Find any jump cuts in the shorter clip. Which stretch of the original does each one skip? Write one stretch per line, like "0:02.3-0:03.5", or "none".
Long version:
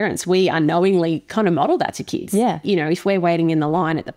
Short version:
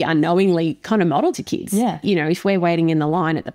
0:01.6-0:01.7